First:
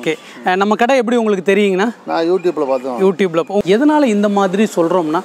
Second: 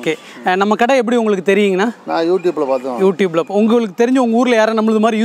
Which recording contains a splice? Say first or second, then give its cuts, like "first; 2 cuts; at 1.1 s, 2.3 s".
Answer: first; 1 cut; at 3.6 s